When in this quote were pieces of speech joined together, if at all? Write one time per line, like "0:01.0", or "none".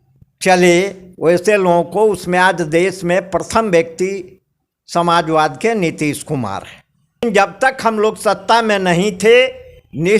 0:07.2

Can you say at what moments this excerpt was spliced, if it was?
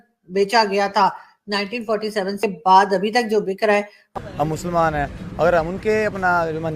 0:02.4
0:04.1

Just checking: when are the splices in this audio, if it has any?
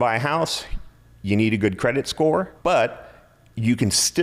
0:02.5

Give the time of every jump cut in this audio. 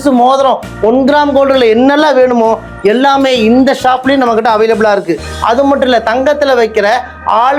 none

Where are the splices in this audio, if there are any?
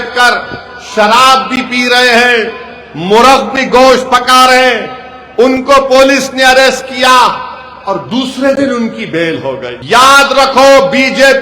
0:09.7

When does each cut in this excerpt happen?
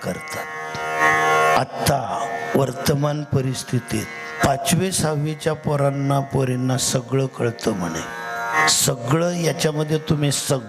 0:01.0
0:04.4
0:08.6

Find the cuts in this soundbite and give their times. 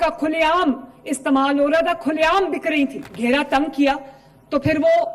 0:03.0

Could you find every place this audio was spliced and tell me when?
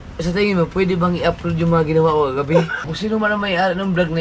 0:02.8

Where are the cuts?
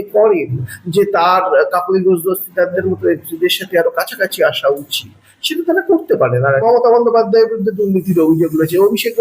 0:06.6

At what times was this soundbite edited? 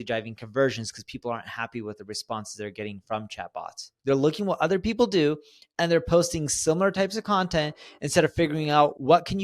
0:03.8

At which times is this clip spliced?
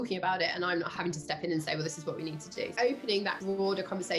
0:01.0
0:02.7
0:03.4

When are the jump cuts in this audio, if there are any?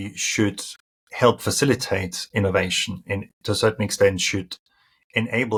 none

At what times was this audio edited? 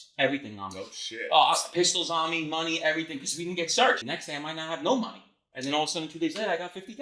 0:04.1

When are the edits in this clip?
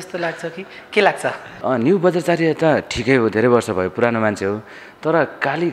0:01.5

